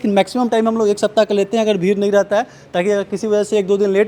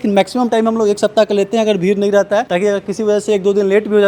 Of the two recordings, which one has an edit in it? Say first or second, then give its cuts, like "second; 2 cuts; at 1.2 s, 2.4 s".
second; 1 cut; at 2.5 s